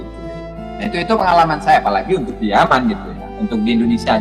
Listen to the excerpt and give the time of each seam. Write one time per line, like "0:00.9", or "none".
none